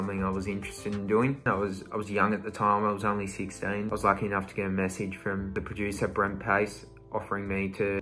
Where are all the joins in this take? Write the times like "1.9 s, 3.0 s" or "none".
none

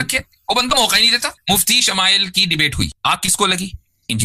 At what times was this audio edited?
1.3 s, 2.9 s

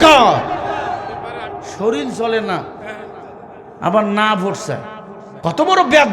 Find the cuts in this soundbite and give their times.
1.7 s

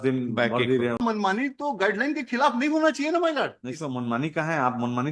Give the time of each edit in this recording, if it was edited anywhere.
1.0 s

